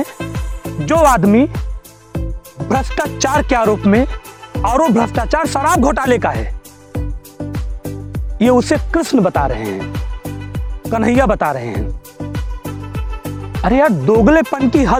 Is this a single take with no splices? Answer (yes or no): yes